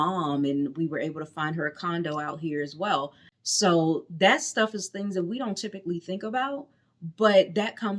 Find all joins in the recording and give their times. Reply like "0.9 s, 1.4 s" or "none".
3.2 s